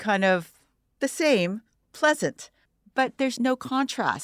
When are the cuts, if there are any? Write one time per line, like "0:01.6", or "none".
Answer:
0:03.2